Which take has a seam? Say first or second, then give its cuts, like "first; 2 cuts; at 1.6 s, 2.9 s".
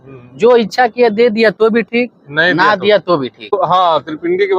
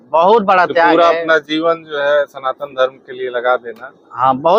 first; 1 cut; at 3.5 s